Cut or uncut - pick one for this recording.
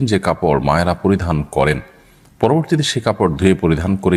uncut